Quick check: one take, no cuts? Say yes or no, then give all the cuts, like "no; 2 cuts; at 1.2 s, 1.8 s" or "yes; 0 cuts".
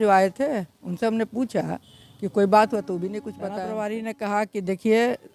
no; 1 cut; at 3.4 s